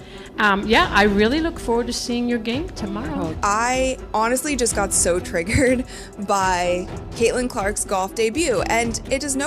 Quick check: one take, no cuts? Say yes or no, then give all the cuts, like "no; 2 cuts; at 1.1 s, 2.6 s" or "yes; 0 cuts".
no; 1 cut; at 6.0 s